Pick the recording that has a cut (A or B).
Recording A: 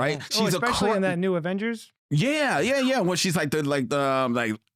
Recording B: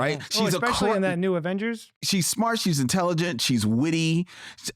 B